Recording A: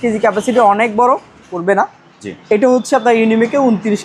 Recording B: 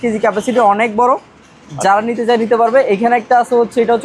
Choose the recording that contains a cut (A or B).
A